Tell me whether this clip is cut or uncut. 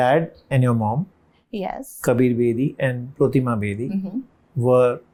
uncut